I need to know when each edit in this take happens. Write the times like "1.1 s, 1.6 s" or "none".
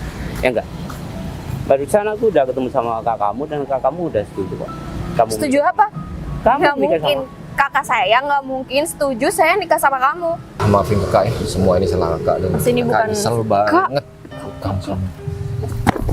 10.5 s

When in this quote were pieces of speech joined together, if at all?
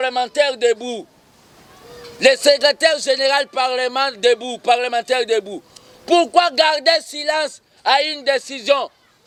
none

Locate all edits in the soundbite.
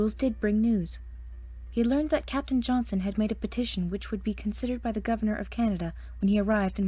4.0 s

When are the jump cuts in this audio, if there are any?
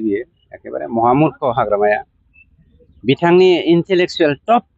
none

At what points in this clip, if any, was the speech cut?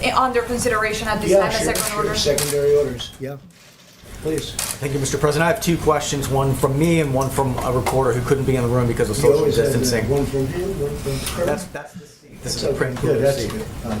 none

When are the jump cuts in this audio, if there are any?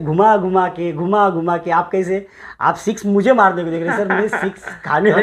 none

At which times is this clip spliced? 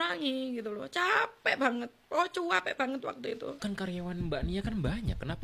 none

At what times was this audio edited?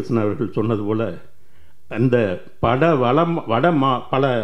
none

